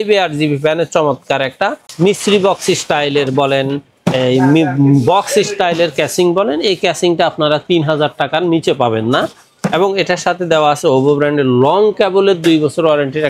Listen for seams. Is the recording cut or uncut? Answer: uncut